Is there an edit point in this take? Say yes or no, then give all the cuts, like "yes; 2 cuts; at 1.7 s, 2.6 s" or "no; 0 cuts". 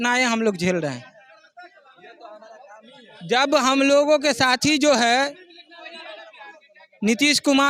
no; 0 cuts